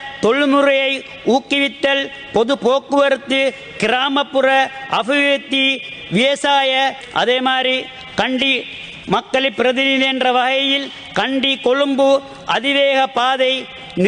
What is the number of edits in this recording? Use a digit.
1